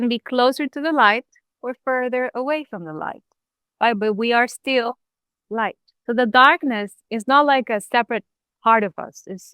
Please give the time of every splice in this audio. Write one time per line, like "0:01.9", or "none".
0:05.9
0:07.0